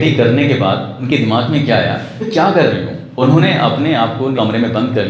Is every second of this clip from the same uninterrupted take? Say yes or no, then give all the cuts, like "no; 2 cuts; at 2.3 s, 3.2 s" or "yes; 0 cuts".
no; 4 cuts; at 1.0 s, 2.2 s, 3.0 s, 4.3 s